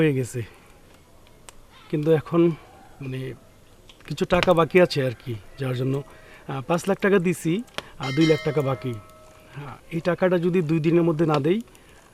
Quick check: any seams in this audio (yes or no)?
no